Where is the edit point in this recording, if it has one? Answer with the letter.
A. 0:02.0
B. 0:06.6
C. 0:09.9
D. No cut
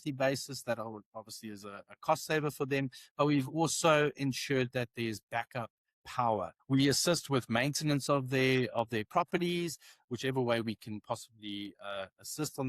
B